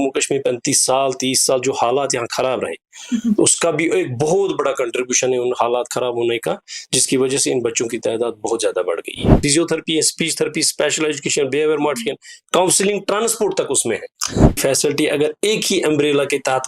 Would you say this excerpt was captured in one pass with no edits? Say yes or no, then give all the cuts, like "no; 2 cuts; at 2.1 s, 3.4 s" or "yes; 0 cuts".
no; 2 cuts; at 9.4 s, 14.5 s